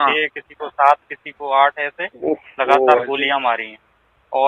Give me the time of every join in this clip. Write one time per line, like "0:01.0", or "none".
none